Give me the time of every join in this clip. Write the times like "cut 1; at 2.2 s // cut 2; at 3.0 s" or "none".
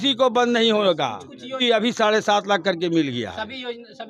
cut 1; at 1.6 s